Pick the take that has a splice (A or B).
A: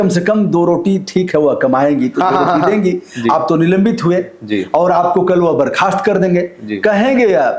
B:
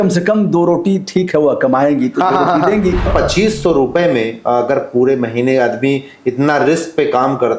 B